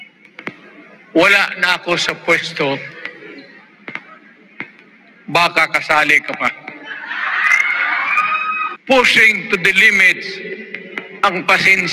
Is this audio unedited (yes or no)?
no